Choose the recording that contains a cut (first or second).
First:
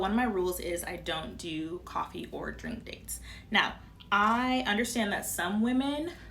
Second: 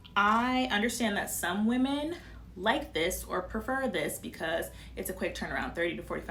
first